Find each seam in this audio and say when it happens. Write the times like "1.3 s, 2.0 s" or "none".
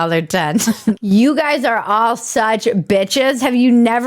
1.0 s